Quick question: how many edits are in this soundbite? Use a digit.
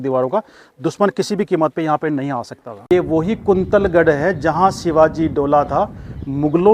1